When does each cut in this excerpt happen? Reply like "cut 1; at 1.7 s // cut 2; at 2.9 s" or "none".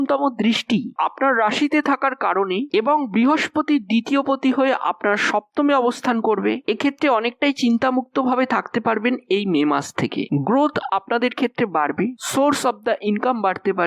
none

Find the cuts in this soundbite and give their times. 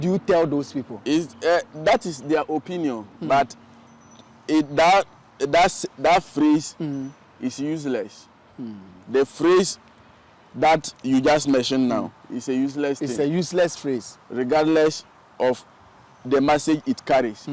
none

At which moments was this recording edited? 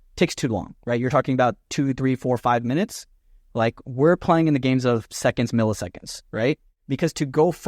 cut 1; at 6.8 s

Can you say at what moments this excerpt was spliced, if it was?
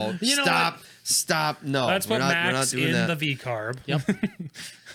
none

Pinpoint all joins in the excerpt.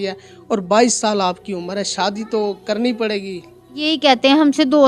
cut 1; at 3.9 s

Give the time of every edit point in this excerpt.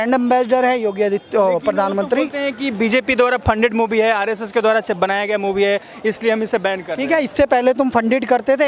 none

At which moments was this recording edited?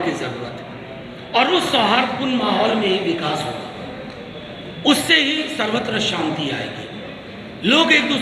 none

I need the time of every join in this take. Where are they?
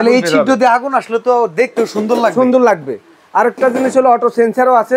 none

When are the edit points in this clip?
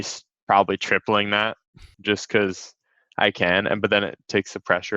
cut 1; at 1.9 s

